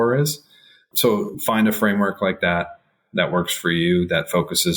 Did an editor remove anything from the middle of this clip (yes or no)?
yes